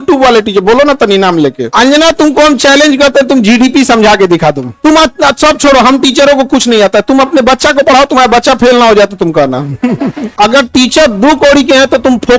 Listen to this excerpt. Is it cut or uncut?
cut